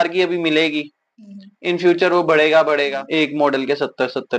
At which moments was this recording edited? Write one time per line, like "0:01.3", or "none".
0:03.0